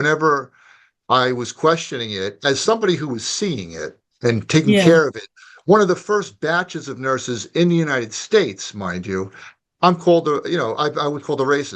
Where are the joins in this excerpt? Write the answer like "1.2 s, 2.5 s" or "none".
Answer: none